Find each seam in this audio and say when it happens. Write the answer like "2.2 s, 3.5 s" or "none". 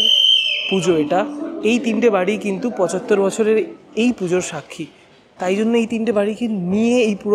none